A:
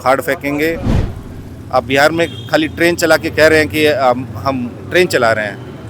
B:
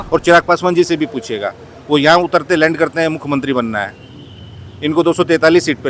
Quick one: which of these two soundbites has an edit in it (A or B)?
A